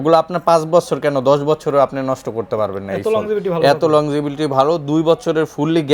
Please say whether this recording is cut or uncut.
uncut